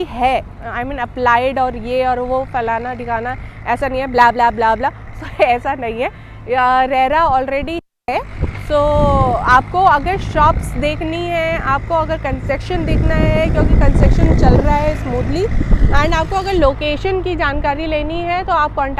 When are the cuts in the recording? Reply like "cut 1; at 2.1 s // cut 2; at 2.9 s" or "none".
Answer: none